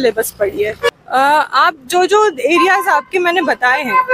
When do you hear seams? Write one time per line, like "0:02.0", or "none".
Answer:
0:00.9